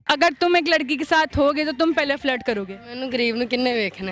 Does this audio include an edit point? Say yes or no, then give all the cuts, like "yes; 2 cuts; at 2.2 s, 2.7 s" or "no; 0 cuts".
no; 0 cuts